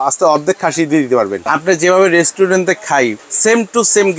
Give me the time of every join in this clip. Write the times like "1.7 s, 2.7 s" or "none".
1.4 s, 3.3 s